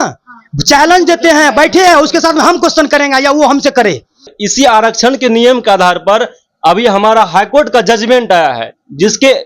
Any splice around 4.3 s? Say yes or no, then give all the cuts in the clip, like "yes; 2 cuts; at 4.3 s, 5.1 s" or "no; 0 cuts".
yes; 1 cut; at 4.3 s